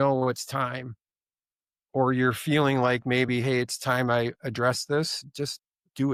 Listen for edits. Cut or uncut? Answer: uncut